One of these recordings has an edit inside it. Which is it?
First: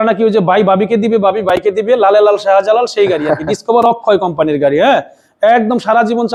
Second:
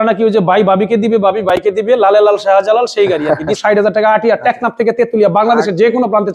second; 1 cut; at 3.5 s

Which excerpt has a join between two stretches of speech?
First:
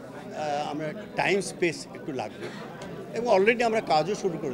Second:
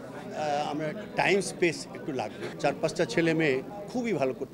second; 1 cut; at 2.4 s

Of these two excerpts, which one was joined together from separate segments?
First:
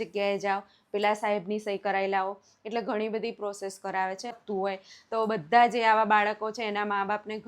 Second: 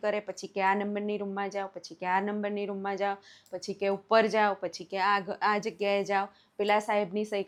first; 1 cut; at 4.4 s

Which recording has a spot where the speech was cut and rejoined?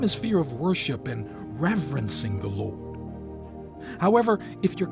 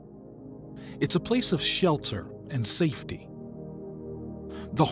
first; 2 cuts; at 2.7 s, 3.9 s

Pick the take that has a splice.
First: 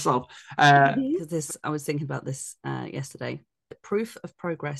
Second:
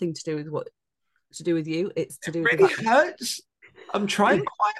first; 2 cuts; at 1.3 s, 3.8 s

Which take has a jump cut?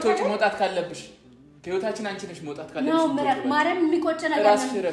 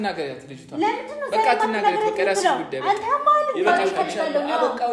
second; 1 cut; at 3.9 s

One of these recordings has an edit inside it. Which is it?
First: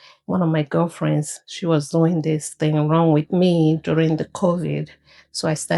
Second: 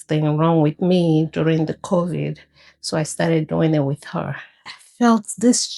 second; 1 cut; at 4.8 s

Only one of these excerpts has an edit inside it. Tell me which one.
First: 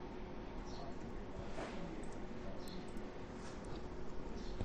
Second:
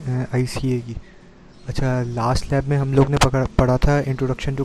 first; 1 cut; at 1.1 s

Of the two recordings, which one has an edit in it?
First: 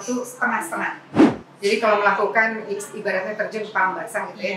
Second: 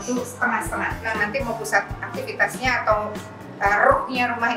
second; 1 cut; at 1.1 s

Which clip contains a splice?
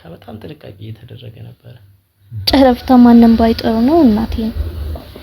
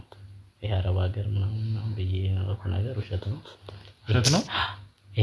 first; 1 cut; at 2.5 s

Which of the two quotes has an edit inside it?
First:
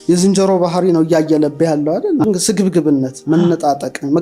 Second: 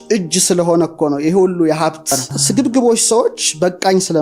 second; 1 cut; at 2.1 s

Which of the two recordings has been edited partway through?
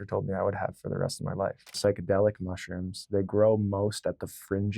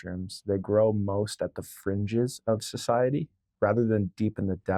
first; 1 cut; at 1.7 s

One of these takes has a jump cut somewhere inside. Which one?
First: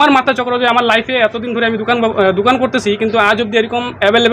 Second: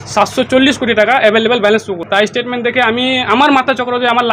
second; 1 cut; at 2.0 s

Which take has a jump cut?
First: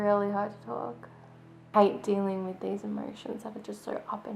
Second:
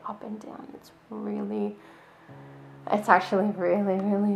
first; 1 cut; at 1.7 s

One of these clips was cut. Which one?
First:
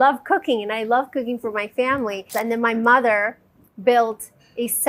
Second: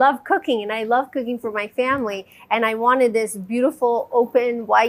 first; 1 cut; at 2.3 s

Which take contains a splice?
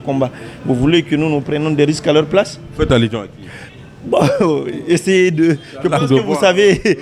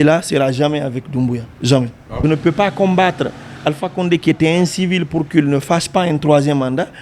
second; 1 cut; at 2.2 s

